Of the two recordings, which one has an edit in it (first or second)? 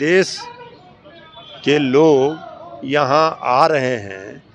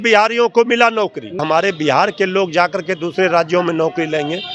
second